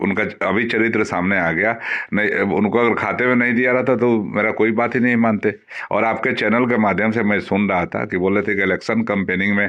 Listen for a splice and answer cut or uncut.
uncut